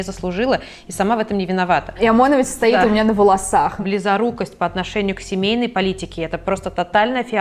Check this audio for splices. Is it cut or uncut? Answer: cut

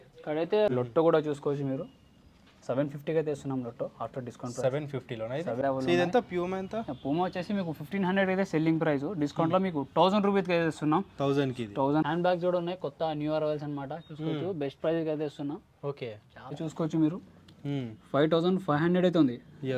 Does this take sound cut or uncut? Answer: cut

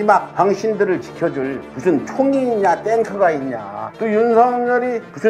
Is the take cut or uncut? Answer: uncut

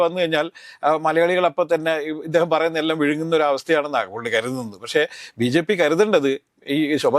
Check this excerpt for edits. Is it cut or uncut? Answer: uncut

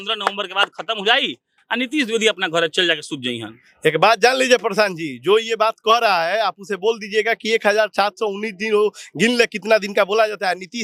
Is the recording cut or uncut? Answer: uncut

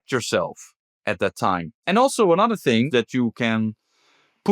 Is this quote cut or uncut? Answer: cut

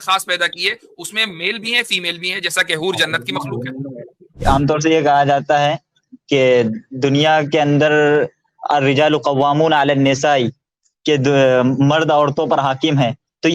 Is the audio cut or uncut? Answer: cut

